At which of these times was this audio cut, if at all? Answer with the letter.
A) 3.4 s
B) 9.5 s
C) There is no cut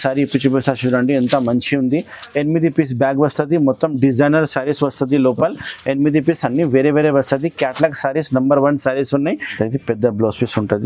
B